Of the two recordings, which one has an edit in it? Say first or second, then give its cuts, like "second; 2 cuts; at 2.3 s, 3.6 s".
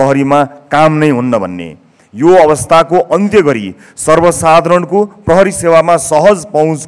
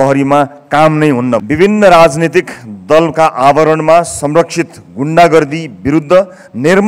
second; 1 cut; at 1.4 s